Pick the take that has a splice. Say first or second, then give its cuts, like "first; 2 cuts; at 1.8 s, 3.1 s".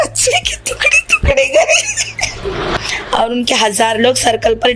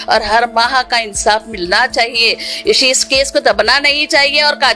first; 1 cut; at 2.7 s